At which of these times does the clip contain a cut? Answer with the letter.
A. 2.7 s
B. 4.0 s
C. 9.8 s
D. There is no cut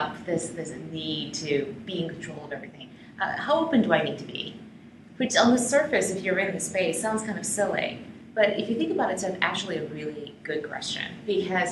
D